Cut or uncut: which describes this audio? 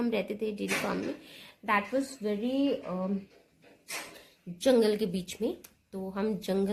uncut